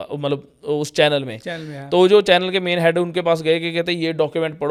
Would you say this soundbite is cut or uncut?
uncut